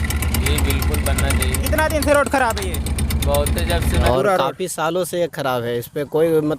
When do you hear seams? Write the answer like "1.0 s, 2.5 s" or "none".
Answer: 3.9 s